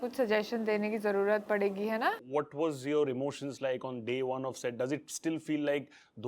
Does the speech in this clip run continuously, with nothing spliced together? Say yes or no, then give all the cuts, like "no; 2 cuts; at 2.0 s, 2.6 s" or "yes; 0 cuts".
no; 1 cut; at 2.2 s